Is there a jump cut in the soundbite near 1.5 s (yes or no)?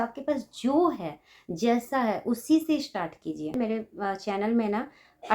no